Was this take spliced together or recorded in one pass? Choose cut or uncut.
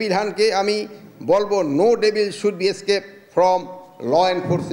uncut